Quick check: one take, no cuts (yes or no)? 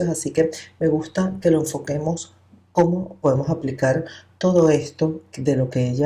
yes